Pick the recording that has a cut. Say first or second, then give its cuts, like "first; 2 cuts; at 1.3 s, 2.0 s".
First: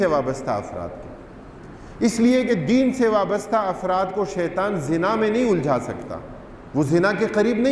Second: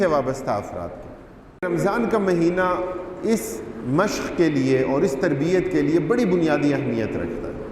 second; 1 cut; at 1.7 s